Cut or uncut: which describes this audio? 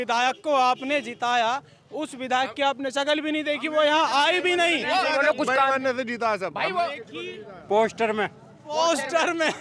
uncut